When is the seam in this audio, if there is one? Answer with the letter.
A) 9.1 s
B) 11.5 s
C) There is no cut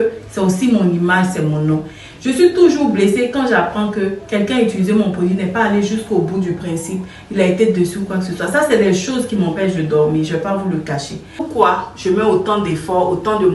B